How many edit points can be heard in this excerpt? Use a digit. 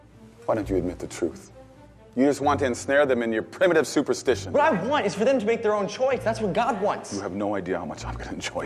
1